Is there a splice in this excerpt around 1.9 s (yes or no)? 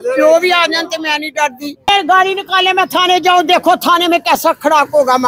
yes